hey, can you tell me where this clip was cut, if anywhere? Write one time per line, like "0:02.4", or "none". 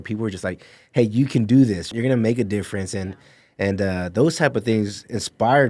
0:01.9